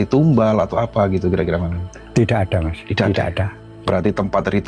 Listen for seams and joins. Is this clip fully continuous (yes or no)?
no